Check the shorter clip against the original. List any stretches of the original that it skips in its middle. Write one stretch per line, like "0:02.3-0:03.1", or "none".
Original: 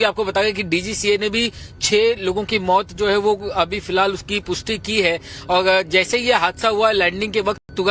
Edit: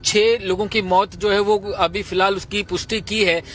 none